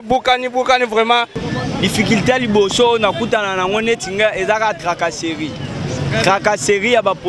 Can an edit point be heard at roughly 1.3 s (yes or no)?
yes